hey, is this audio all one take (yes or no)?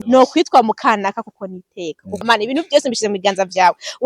no